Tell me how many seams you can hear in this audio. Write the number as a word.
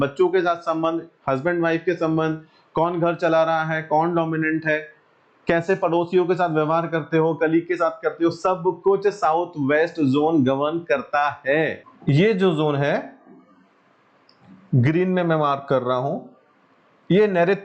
one